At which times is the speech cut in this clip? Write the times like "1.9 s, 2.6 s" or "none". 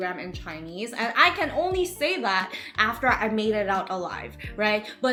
none